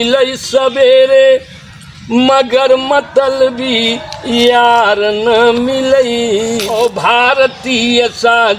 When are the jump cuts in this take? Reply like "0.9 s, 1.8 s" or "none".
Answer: 6.7 s